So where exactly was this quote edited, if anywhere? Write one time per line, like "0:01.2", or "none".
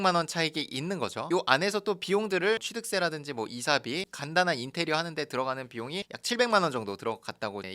none